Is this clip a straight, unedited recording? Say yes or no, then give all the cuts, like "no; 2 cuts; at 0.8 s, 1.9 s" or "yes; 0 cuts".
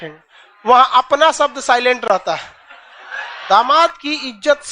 no; 1 cut; at 3.4 s